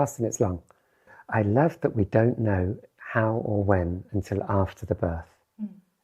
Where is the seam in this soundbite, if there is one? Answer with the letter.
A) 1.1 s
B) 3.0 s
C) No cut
A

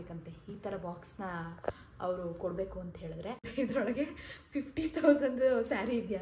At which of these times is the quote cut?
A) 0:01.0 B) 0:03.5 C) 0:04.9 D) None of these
B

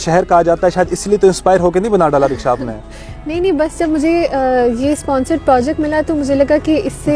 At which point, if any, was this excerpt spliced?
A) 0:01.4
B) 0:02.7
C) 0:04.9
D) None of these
D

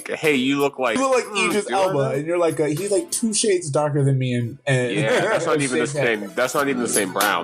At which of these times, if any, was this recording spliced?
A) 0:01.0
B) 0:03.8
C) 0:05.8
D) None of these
A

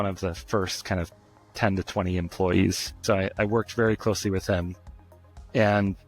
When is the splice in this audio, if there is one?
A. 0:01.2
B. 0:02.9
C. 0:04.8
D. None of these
B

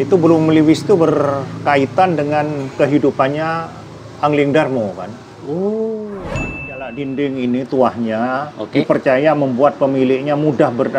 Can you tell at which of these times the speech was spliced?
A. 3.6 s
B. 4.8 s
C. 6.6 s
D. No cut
C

